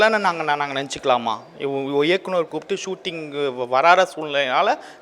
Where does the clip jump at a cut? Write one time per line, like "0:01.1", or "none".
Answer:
none

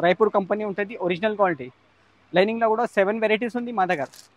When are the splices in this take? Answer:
none

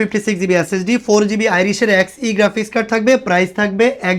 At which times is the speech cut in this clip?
none

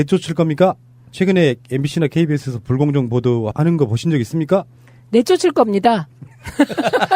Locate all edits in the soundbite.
0:04.4

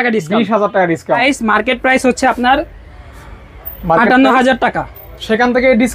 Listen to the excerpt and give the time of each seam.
0:01.2

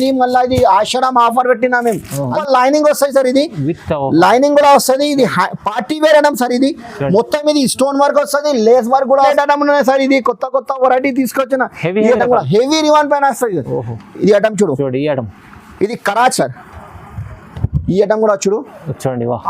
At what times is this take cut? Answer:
0:02.4
0:09.3
0:16.3

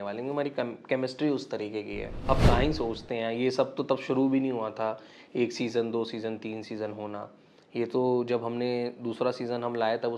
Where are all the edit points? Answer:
0:02.3

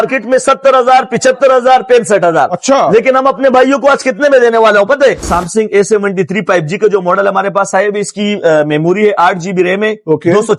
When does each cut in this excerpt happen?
0:05.2

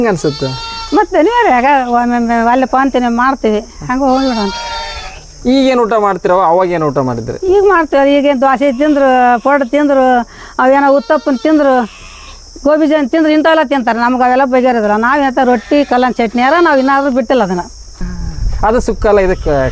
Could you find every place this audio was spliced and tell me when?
0:17.9

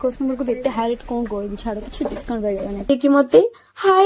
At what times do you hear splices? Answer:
0:02.9

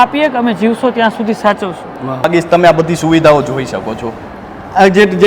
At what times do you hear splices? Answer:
0:02.3

